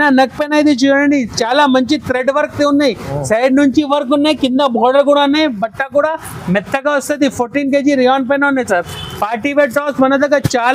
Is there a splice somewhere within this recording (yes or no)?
no